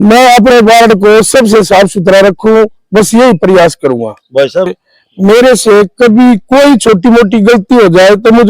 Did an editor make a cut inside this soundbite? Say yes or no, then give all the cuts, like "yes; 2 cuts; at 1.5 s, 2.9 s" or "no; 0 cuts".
yes; 1 cut; at 4.7 s